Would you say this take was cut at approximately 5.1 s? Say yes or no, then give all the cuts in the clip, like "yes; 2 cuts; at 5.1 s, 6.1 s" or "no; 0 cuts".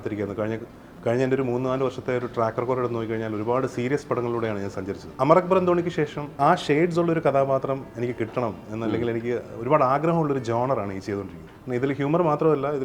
no; 2 cuts; at 6.4 s, 11.4 s